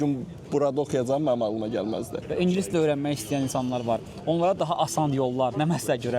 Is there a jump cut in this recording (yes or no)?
yes